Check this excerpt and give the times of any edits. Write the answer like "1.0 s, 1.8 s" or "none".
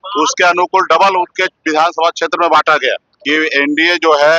3.1 s